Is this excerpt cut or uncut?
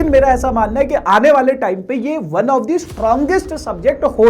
uncut